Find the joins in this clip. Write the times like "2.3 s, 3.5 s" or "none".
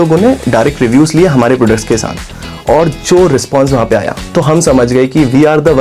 4.2 s